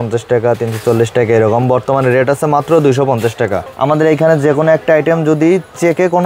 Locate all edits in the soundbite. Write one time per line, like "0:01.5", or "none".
0:03.7